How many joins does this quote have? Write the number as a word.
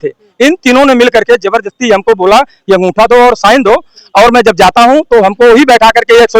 one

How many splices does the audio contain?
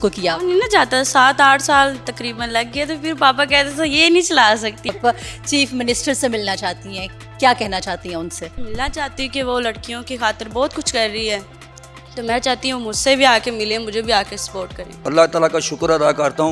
three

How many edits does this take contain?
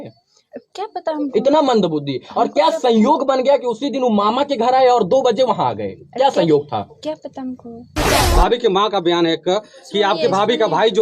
one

